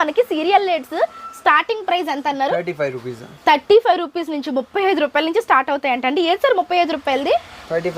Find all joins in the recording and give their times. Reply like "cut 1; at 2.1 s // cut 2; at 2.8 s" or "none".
none